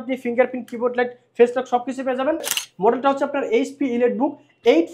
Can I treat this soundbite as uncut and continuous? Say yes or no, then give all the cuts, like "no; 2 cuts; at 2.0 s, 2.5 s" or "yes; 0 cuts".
no; 1 cut; at 2.5 s